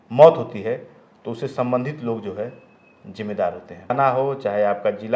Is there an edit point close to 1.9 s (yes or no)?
no